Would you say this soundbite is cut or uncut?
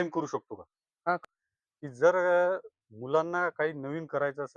cut